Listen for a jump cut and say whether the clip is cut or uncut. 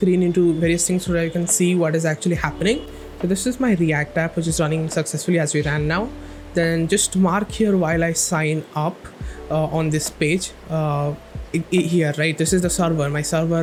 uncut